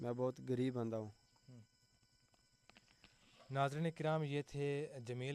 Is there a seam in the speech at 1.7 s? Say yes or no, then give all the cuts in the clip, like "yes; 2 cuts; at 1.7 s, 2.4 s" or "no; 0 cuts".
no; 0 cuts